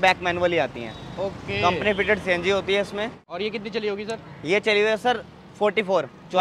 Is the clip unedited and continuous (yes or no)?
yes